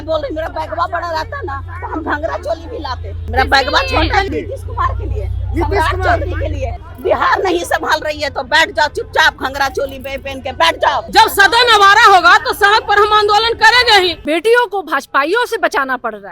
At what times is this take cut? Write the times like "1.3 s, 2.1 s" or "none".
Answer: 3.3 s, 4.3 s, 6.8 s, 11.1 s, 14.2 s